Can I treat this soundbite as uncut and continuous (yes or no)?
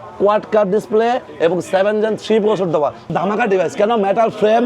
no